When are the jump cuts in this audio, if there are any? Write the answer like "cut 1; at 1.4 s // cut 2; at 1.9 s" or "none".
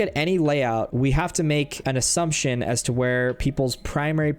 cut 1; at 0.9 s // cut 2; at 1.8 s